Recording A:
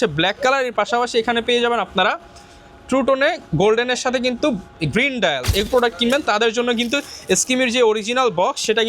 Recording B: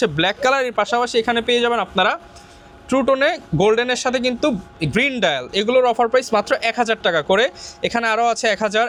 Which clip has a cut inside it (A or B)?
A